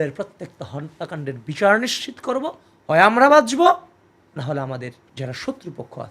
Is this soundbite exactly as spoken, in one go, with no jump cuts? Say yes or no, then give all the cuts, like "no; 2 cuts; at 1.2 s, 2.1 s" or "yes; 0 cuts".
no; 1 cut; at 5.0 s